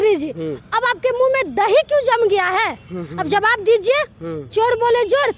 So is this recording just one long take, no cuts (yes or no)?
yes